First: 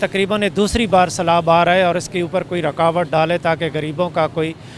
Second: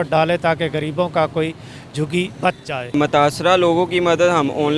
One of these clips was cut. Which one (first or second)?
second